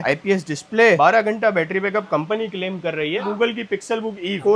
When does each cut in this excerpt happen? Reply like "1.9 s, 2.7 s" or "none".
3.2 s